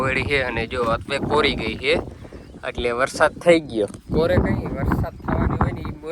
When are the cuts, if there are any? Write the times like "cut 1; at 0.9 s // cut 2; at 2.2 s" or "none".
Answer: none